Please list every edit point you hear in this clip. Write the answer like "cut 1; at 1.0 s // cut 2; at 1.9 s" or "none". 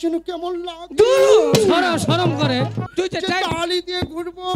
cut 1; at 2.9 s